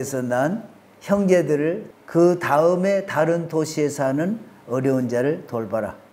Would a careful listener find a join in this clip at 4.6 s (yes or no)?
no